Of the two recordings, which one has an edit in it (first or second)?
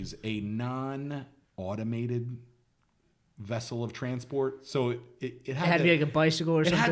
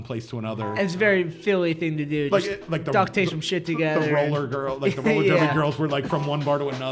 first